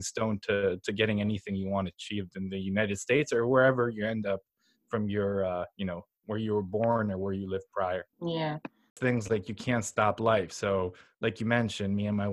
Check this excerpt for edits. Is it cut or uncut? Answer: cut